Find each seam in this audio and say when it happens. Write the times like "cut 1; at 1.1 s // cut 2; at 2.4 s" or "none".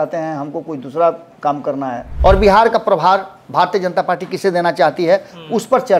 cut 1; at 2.0 s